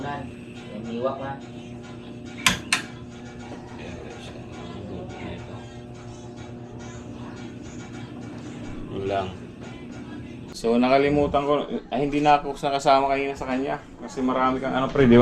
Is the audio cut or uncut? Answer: cut